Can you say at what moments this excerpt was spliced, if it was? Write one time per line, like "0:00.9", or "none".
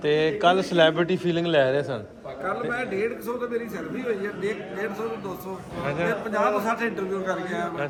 none